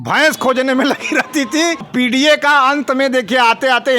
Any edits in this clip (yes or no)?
yes